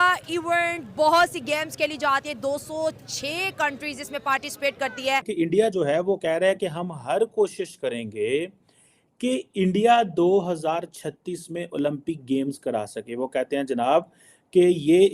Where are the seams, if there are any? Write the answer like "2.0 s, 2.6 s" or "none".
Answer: 5.3 s